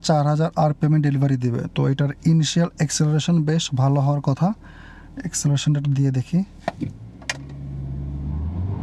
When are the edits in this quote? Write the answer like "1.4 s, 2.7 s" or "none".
none

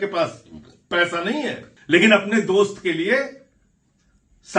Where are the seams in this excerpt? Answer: 1.7 s

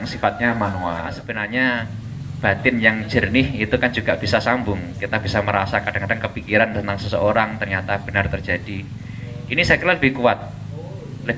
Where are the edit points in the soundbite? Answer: 1.3 s

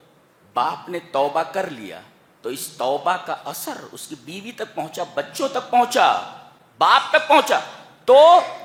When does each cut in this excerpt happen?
none

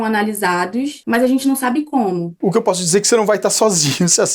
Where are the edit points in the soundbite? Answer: 1.0 s, 2.3 s

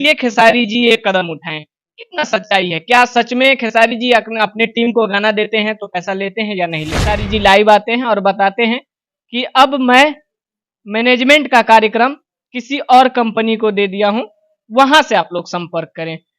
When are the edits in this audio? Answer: 7.3 s

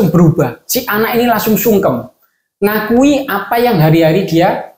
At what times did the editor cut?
none

